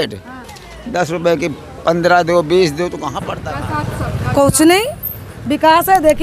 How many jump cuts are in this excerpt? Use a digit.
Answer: 1